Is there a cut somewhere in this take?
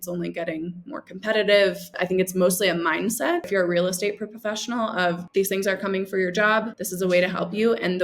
yes; 4 cuts; at 1.9 s, 3.5 s, 5.2 s, 6.8 s

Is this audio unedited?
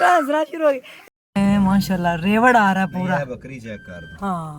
no; 1 cut; at 0.9 s

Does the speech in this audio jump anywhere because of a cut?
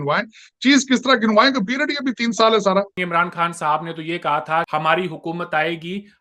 yes; 2 cuts; at 3.0 s, 4.7 s

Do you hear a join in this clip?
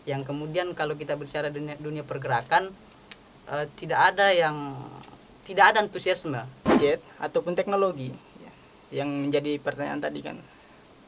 yes; 1 cut; at 6.8 s

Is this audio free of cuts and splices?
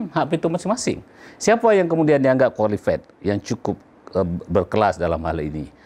yes; 0 cuts

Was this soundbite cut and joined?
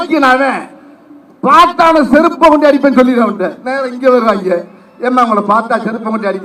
no; 0 cuts

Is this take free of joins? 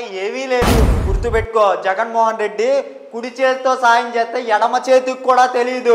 no; 1 cut; at 1.0 s

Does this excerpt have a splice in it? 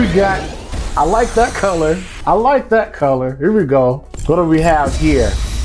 yes; 2 cuts; at 2.1 s, 4.1 s

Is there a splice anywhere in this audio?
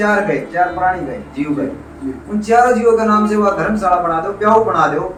no; 0 cuts

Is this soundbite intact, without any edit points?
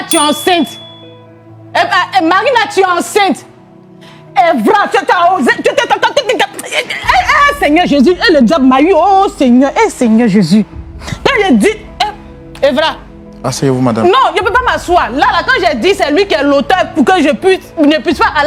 yes; 0 cuts

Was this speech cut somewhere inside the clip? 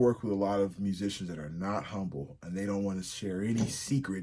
no; 0 cuts

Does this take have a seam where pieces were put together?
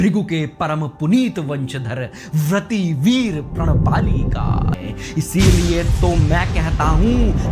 yes; 1 cut; at 4.8 s

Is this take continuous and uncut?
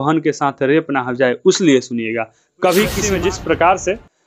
no; 1 cut; at 3.0 s

